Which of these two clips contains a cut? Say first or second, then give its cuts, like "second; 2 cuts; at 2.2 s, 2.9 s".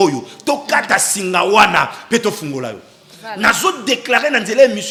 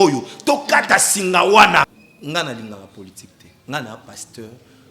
second; 1 cut; at 2.0 s